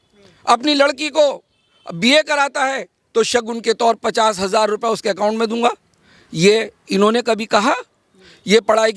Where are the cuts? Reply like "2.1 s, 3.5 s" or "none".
none